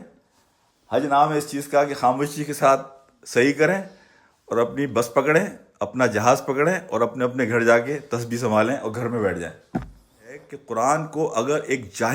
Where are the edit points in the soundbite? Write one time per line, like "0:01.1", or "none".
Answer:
0:10.5